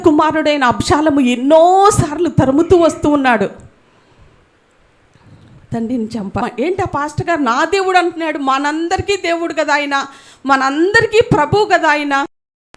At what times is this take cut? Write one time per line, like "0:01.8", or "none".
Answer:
0:06.4